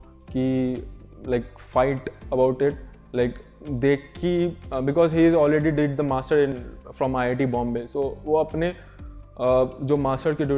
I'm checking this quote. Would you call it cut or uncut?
uncut